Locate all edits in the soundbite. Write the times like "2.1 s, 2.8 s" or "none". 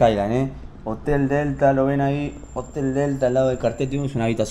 none